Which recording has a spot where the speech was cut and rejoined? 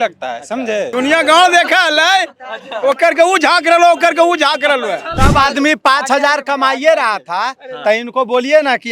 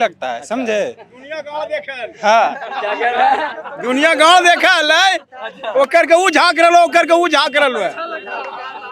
first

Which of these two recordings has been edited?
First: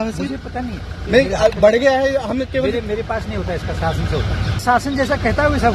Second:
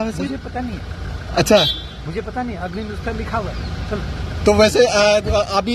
first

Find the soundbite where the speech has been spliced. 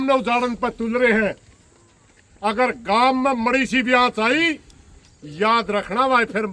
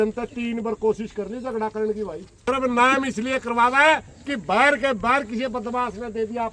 second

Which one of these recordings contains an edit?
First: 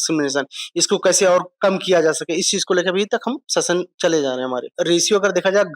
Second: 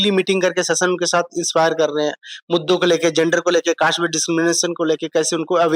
first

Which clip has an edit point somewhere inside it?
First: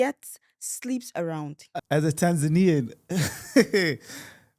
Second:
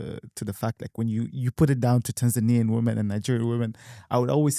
first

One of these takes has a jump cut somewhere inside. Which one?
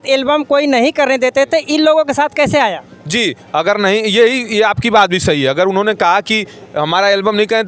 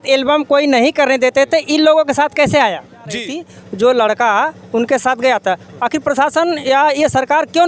second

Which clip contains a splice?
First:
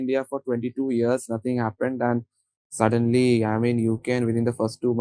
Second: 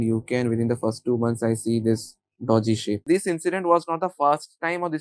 second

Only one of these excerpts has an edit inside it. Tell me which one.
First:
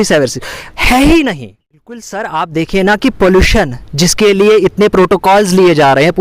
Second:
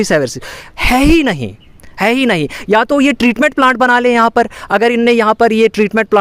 first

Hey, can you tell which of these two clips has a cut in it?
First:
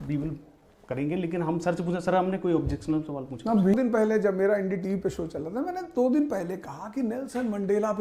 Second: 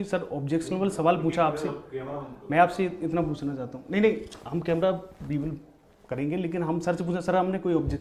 first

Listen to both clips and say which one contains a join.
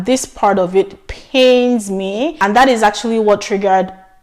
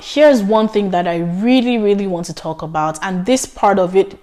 first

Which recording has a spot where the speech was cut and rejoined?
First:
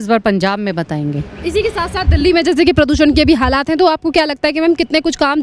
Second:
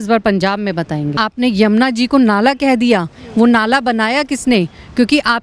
second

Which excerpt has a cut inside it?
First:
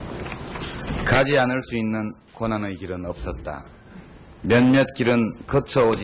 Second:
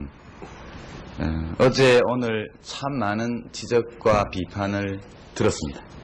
first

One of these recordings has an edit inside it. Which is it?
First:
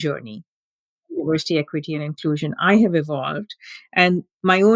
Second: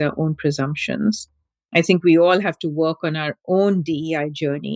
first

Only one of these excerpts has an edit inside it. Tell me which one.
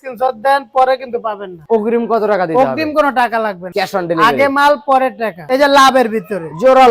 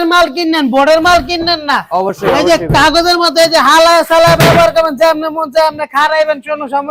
first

